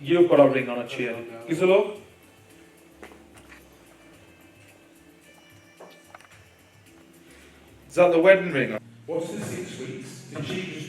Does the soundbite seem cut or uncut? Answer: cut